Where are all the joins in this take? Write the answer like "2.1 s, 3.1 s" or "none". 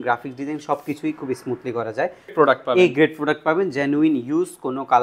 2.3 s